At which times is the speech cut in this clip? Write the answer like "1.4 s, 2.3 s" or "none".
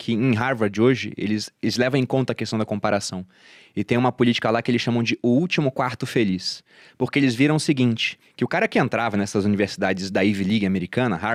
none